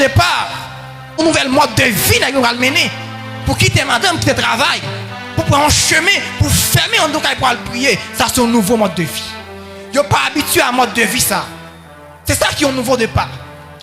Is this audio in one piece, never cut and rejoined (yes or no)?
no